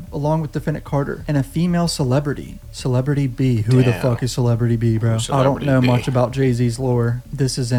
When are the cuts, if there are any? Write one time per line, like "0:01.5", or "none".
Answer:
none